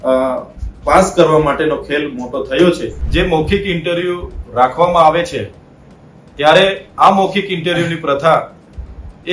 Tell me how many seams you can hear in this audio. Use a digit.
1